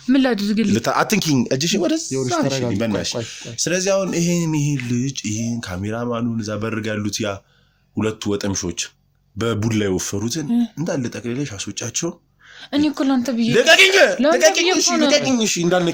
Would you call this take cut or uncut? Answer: uncut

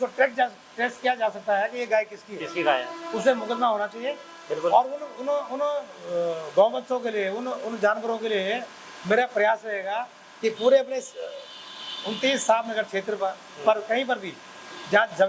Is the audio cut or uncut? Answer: uncut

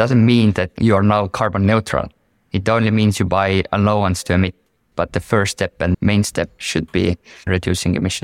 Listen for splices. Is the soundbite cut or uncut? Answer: cut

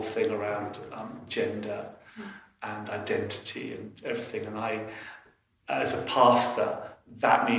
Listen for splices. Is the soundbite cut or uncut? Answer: uncut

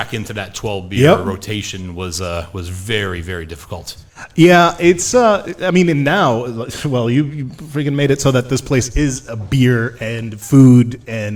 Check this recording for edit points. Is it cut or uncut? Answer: uncut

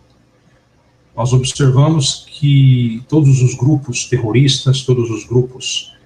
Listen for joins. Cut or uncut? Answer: uncut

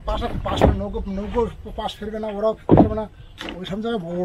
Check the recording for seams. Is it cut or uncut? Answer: uncut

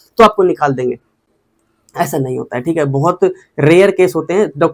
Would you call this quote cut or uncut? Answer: uncut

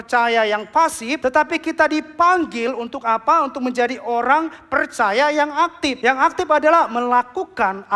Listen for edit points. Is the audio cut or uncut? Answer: cut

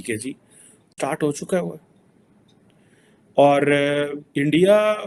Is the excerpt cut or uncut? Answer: uncut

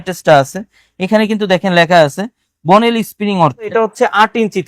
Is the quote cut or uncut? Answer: cut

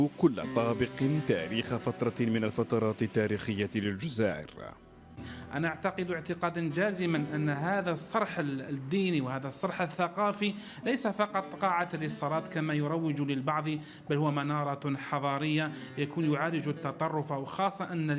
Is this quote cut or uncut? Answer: cut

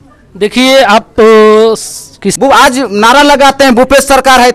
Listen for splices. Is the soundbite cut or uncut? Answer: cut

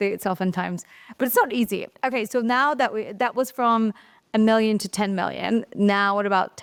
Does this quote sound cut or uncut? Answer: uncut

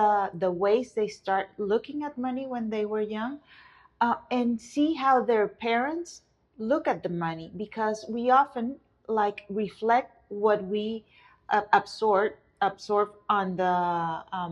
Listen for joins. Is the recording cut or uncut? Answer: uncut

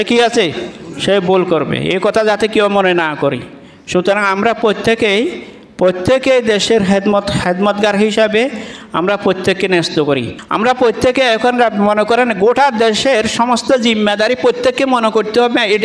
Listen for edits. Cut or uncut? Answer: cut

